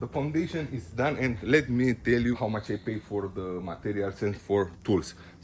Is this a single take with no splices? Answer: no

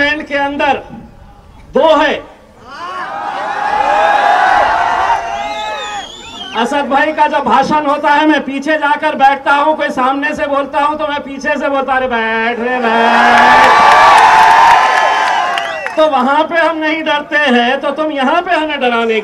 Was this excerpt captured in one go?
yes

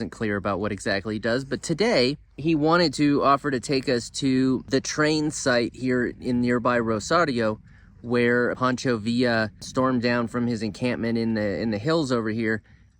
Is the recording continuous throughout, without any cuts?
no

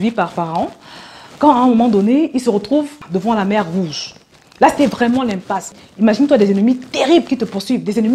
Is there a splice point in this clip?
yes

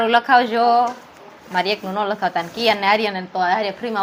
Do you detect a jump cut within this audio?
no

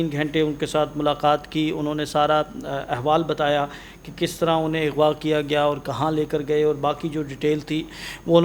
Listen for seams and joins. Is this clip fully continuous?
yes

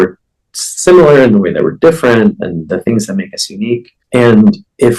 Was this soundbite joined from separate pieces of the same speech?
yes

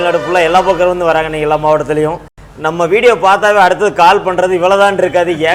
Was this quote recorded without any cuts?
yes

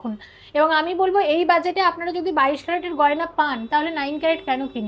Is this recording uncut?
yes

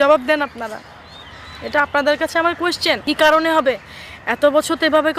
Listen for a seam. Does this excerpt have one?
yes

